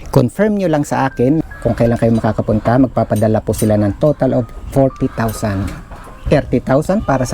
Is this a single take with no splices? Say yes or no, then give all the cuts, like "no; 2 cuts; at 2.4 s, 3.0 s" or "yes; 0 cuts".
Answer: no; 1 cut; at 1.4 s